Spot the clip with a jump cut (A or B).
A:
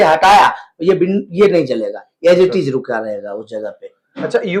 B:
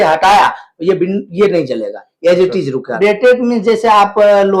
B